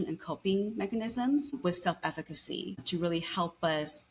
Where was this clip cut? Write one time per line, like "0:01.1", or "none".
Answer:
0:01.6
0:02.8